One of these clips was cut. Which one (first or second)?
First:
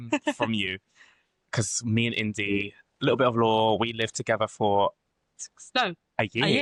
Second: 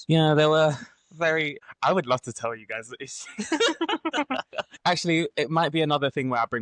second